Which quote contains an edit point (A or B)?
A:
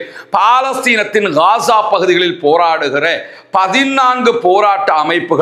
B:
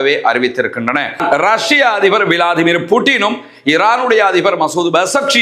B